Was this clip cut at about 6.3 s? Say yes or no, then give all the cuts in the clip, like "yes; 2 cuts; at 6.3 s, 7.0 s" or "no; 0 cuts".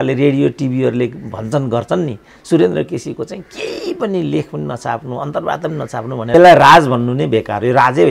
yes; 1 cut; at 6.3 s